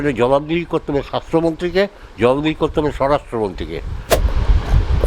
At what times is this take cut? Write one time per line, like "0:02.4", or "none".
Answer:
0:04.2